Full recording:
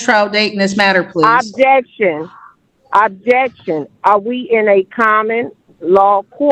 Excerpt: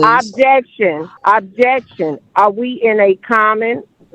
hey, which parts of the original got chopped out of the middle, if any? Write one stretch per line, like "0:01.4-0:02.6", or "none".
0:02.3-0:02.8